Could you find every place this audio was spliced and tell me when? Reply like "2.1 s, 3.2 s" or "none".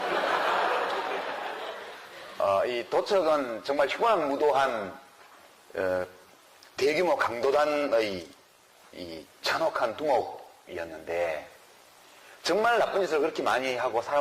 10.3 s